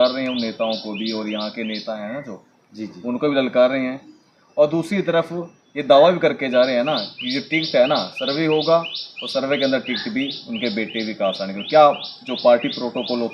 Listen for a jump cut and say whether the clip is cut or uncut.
uncut